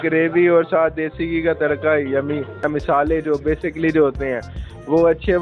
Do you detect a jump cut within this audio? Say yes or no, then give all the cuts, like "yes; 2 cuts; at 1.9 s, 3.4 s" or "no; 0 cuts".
yes; 1 cut; at 2.6 s